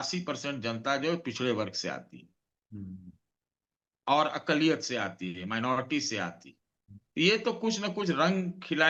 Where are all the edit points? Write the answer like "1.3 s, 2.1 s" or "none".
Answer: none